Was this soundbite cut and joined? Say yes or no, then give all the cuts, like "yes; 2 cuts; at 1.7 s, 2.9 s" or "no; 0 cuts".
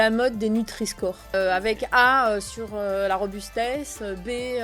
yes; 1 cut; at 1.3 s